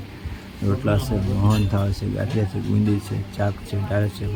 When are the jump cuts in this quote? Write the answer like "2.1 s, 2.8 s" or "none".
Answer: none